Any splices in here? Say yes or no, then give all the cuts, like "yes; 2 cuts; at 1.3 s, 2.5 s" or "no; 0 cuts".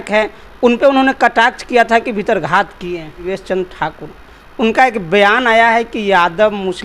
yes; 1 cut; at 3.3 s